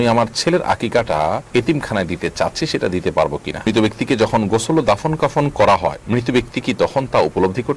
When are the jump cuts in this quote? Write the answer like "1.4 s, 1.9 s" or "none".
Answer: 1.4 s, 3.7 s

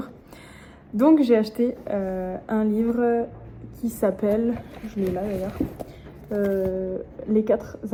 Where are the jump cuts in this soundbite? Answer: none

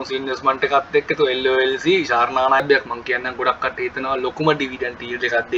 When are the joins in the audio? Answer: 2.6 s

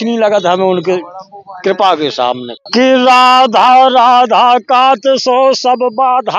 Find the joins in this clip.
2.5 s

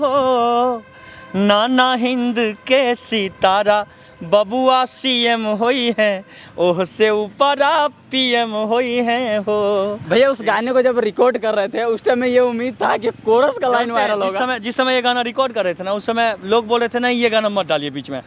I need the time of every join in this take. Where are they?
none

